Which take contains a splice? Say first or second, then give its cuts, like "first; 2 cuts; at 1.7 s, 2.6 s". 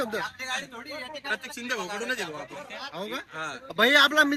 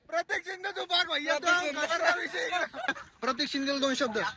second; 1 cut; at 3.1 s